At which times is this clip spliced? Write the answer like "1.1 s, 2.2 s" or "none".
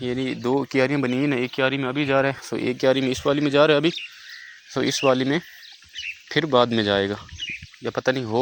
none